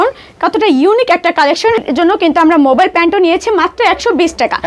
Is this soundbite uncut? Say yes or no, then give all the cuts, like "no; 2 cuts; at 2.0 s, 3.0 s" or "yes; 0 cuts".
no; 1 cut; at 1.8 s